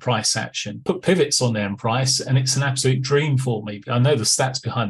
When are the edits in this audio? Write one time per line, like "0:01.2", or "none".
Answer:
0:00.8
0:03.9